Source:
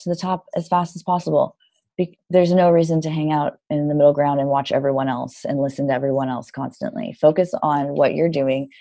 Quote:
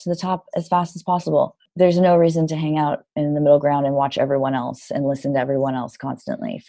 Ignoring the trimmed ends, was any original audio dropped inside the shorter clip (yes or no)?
yes